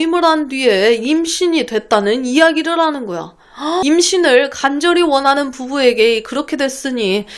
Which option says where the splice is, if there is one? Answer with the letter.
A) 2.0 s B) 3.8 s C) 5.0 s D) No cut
B